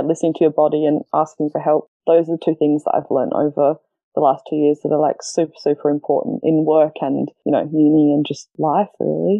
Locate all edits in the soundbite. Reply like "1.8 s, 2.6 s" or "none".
1.9 s, 7.3 s, 8.4 s